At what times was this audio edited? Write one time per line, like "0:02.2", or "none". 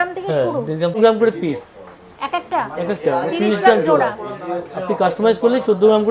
0:01.0